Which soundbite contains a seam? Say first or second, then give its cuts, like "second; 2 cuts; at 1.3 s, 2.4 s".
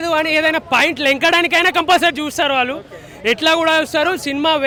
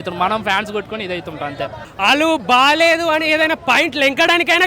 second; 1 cut; at 1.8 s